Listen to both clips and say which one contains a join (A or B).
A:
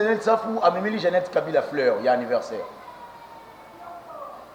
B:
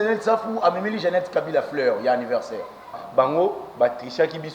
B